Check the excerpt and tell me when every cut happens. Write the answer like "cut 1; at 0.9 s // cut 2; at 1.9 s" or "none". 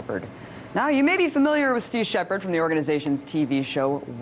none